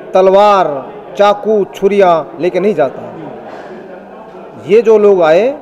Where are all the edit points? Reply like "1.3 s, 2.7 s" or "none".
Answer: none

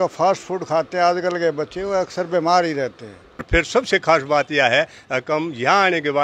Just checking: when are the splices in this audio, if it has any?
3.5 s

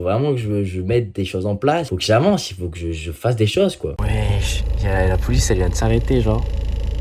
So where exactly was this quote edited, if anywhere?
4.0 s

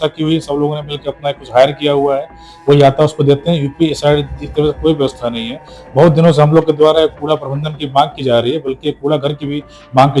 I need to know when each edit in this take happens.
none

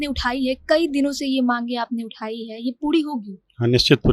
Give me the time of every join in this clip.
none

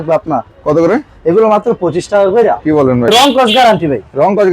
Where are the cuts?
3.1 s

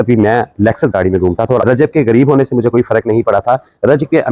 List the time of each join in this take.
1.6 s

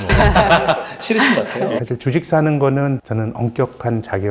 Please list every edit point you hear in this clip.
1.8 s, 3.1 s

